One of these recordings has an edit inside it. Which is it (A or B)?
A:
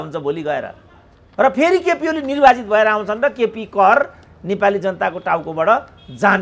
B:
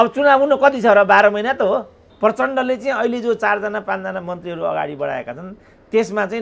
B